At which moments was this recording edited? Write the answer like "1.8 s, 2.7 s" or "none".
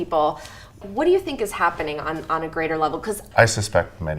0.9 s, 3.2 s